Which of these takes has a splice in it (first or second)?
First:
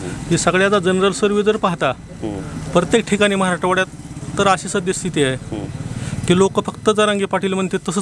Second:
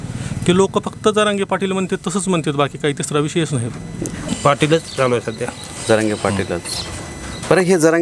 second